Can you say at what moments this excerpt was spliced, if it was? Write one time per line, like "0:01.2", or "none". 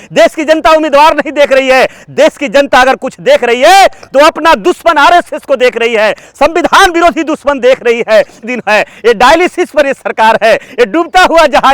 0:08.4